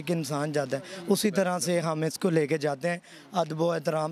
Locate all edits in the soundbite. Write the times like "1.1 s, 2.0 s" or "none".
none